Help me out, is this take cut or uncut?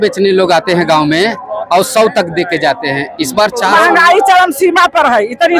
cut